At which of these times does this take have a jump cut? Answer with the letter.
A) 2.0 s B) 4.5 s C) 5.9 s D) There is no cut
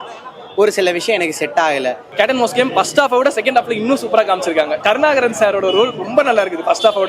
A